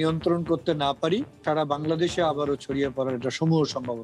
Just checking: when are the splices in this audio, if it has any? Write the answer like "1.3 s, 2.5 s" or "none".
1.4 s